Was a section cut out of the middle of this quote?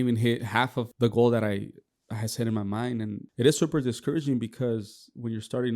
yes; 2 cuts; at 0.9 s, 3.2 s

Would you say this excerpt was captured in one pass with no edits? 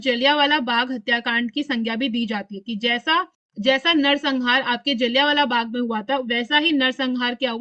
yes; 0 cuts

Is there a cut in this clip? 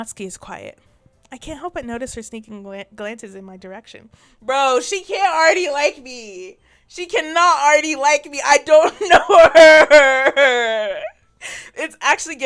no; 0 cuts

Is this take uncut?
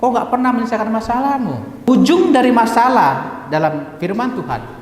no; 1 cut; at 1.9 s

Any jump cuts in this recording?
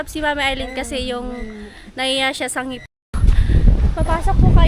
yes; 1 cut; at 3.1 s

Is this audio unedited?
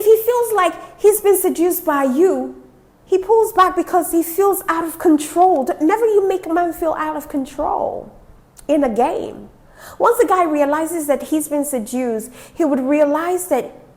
yes; 0 cuts

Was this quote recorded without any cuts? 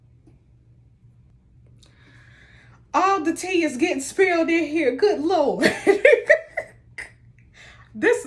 yes; 0 cuts

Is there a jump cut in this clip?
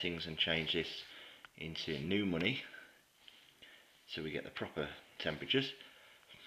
yes; 1 cut; at 1.5 s

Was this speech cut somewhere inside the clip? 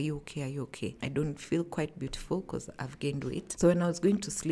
yes; 2 cuts; at 1.0 s, 3.5 s

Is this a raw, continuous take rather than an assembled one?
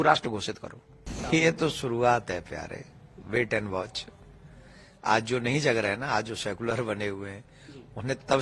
no; 1 cut; at 1.1 s

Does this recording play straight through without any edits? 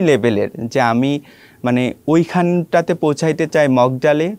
yes; 0 cuts

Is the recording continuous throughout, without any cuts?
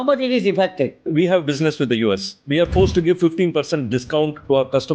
no; 1 cut; at 1.1 s

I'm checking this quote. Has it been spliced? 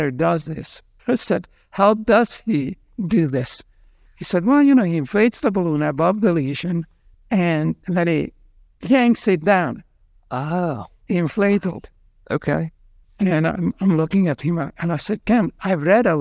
no; 0 cuts

